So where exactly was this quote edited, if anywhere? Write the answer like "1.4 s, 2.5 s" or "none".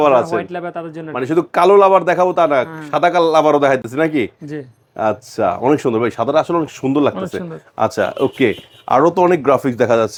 none